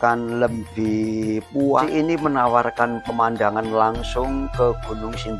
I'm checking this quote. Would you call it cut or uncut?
cut